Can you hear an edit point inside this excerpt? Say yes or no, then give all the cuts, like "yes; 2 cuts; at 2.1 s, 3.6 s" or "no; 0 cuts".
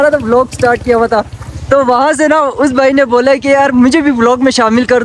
no; 0 cuts